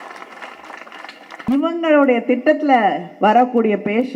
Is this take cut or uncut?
cut